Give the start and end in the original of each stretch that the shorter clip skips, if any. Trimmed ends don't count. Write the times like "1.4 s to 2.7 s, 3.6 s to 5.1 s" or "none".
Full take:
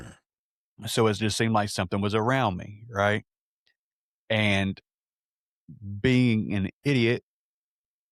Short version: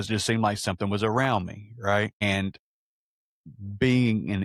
3.3 s to 4.4 s